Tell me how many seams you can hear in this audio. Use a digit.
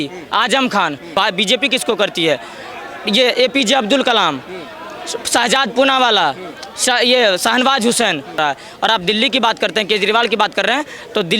2